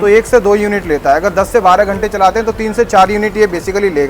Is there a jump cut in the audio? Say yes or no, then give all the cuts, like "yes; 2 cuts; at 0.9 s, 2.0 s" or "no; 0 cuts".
no; 0 cuts